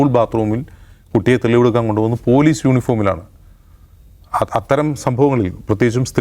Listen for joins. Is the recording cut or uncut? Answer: uncut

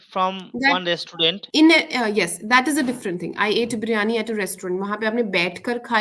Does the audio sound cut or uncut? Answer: cut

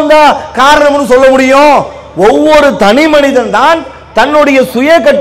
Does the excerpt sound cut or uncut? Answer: uncut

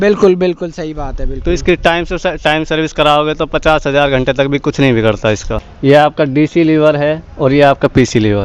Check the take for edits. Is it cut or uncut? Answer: cut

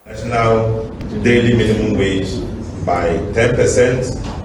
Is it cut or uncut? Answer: cut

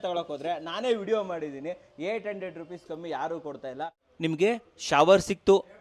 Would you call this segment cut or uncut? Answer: cut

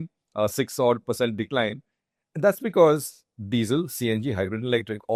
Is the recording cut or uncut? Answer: uncut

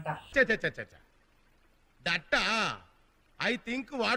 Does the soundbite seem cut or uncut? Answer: uncut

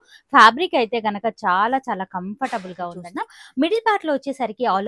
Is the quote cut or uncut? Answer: cut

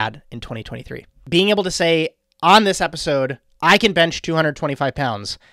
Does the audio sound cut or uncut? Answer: cut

